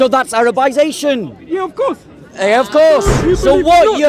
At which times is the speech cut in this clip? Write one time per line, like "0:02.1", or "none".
0:03.1

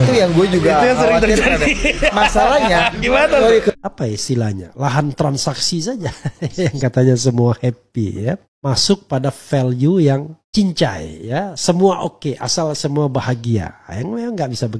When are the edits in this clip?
0:03.8
0:08.5
0:10.4

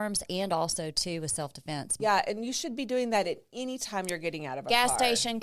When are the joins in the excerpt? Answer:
0:01.9

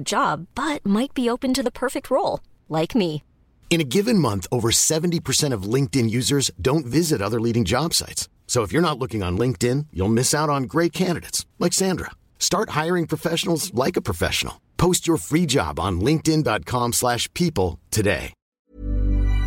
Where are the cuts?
0:18.5

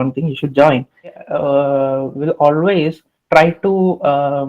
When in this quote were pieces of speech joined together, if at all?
0:01.3

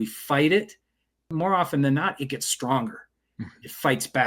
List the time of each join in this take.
0:01.3

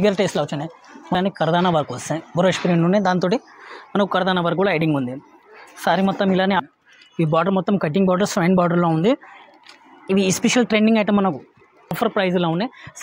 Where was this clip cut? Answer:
0:01.1
0:06.6
0:12.0

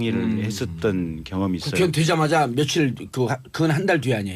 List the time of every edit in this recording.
0:03.4

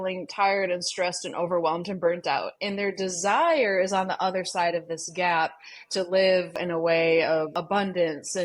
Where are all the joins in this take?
0:06.6
0:07.6

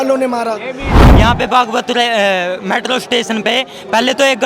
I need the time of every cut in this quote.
0:01.0

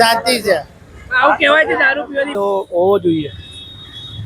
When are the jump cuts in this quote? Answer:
0:02.4

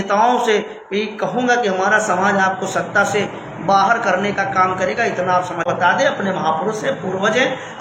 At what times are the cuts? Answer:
0:05.7

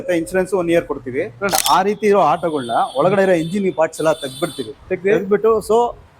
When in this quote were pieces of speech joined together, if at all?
0:01.6

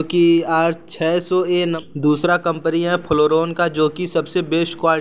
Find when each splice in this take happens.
0:01.8

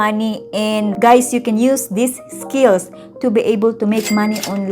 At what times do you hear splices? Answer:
0:01.0

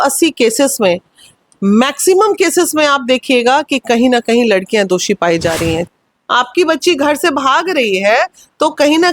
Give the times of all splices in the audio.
0:05.9

